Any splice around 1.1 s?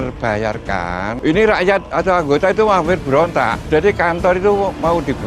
yes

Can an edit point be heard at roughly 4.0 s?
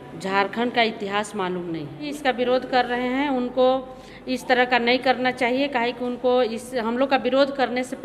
no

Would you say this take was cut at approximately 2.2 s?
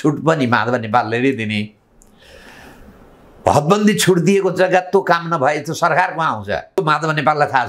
no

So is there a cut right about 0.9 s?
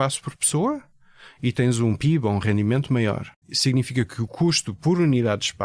no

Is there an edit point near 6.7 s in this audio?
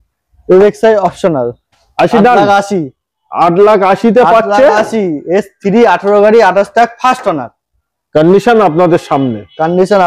no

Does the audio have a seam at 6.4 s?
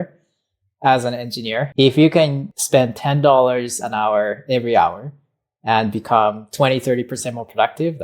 no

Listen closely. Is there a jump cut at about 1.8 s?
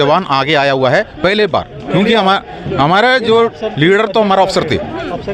no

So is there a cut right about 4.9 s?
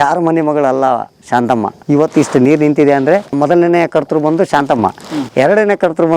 no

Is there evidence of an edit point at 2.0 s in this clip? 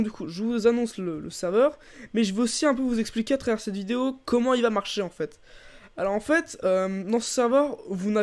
no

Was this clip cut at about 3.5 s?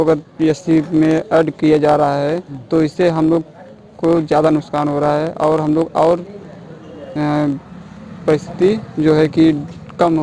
no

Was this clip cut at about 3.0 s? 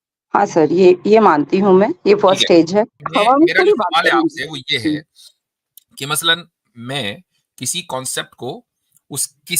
yes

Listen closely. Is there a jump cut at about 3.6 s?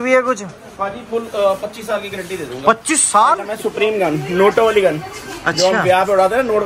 yes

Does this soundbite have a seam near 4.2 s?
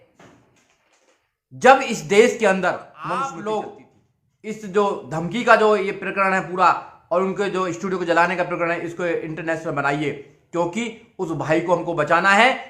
no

